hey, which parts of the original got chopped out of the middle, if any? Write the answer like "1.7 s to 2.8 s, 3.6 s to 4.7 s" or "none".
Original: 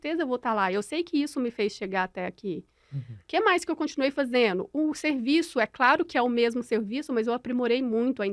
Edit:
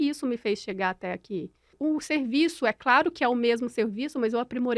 2.9 s to 4.7 s